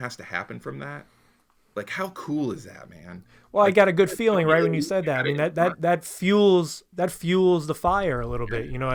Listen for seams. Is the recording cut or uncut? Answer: uncut